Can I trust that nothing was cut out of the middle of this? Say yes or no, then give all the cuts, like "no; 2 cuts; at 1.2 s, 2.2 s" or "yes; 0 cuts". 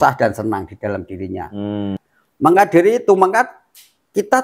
no; 1 cut; at 2.0 s